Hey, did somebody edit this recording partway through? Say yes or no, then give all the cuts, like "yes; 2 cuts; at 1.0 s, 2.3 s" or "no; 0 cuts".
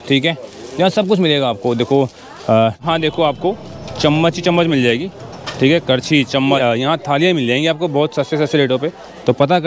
yes; 2 cuts; at 2.8 s, 6.6 s